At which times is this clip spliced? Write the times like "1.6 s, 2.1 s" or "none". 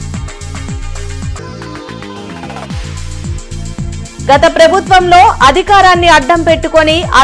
4.0 s